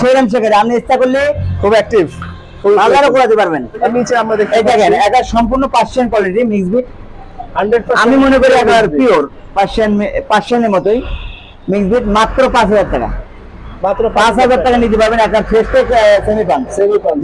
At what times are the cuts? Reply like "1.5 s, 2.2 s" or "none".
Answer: 3.8 s